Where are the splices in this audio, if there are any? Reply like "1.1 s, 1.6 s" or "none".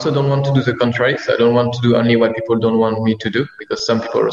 none

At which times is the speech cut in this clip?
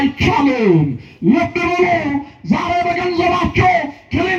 none

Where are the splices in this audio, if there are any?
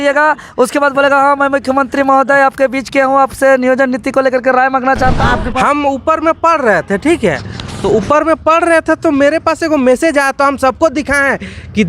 5.2 s

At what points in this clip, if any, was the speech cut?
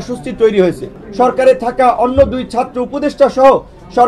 1.0 s

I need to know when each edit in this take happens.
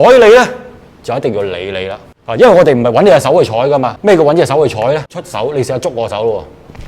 2.1 s, 3.9 s, 5.2 s

